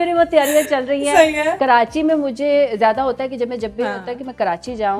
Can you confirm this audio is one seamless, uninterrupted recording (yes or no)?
no